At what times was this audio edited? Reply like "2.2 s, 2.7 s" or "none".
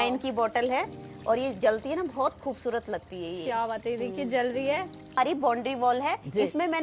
5.2 s